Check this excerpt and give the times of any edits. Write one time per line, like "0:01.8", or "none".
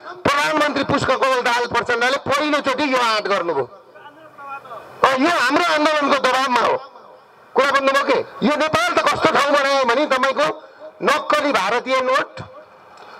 0:08.3